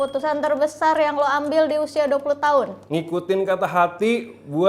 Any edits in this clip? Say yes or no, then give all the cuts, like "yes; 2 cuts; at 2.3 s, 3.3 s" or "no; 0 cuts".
no; 0 cuts